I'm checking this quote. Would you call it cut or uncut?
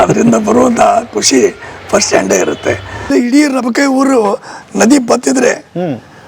cut